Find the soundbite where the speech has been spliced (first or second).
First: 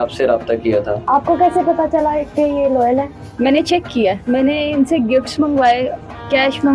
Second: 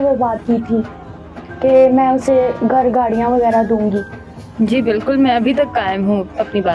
first